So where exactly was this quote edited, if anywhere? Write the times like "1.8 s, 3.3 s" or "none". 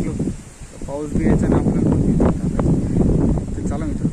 2.9 s